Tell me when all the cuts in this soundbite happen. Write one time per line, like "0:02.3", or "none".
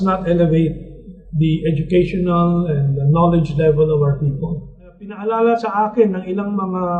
0:05.1